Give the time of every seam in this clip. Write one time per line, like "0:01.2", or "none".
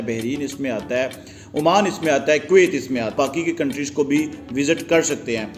0:03.1